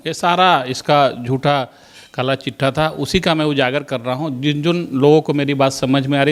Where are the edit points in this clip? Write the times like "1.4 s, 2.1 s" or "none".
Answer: none